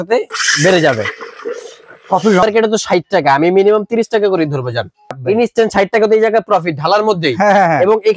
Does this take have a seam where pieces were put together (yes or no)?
yes